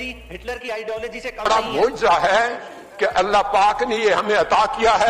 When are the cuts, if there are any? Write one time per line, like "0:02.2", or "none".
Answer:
0:01.5